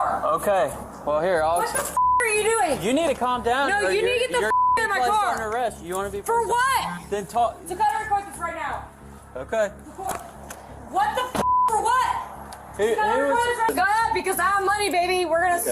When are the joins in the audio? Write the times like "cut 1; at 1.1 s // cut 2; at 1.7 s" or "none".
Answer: cut 1; at 13.7 s